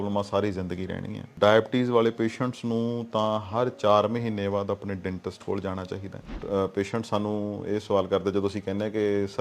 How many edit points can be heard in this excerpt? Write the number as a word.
two